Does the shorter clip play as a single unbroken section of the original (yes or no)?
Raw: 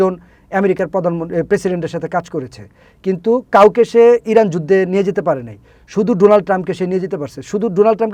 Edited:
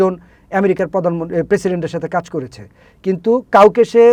yes